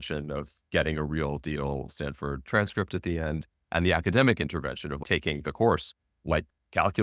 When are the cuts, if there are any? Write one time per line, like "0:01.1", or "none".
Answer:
none